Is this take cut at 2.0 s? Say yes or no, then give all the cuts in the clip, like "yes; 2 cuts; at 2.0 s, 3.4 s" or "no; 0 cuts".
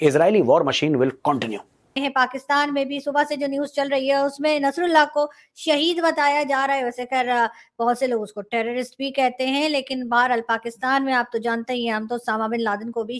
yes; 1 cut; at 2.0 s